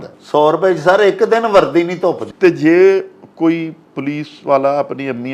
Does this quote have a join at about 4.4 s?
no; 1 cut; at 2.3 s

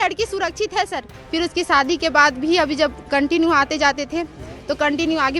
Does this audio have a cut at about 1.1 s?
yes; 1 cut; at 1.1 s

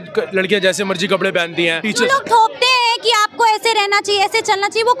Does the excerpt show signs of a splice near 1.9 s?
yes; 1 cut; at 1.9 s

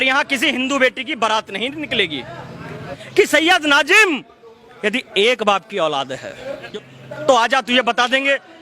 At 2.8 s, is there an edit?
yes; 2 cuts; at 2.8 s, 6.7 s

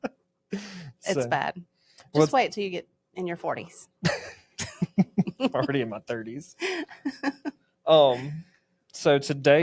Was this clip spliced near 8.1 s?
no; 0 cuts

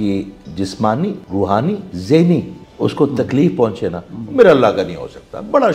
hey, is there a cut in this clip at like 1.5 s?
yes; 2 cuts; at 1.5 s, 2.6 s

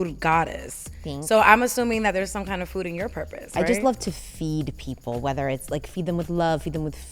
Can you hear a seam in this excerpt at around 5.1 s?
no; 1 cut; at 3.5 s

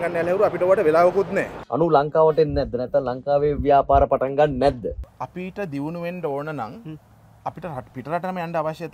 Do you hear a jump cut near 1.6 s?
yes; 2 cuts; at 1.6 s, 5.1 s

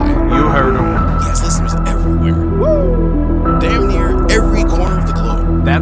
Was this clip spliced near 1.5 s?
no; 0 cuts

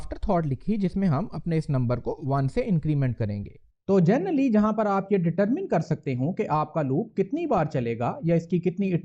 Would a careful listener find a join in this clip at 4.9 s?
no; 1 cut; at 3.6 s

